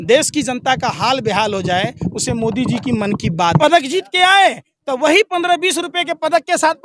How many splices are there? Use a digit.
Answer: 1